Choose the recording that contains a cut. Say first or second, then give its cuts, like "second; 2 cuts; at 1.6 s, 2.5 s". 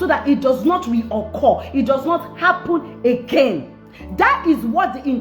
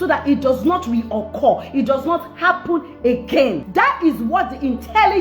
second; 1 cut; at 3.6 s